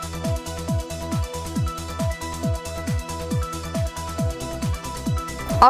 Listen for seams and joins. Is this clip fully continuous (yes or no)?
no